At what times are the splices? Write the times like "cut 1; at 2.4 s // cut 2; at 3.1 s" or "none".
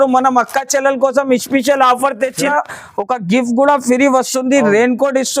cut 1; at 2.5 s